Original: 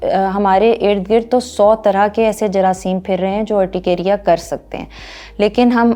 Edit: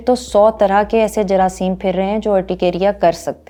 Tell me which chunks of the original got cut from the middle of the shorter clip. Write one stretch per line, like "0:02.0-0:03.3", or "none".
none